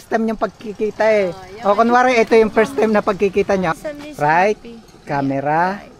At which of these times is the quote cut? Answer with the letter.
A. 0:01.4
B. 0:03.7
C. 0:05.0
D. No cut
B